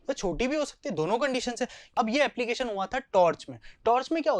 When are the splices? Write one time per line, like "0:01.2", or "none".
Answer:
0:01.8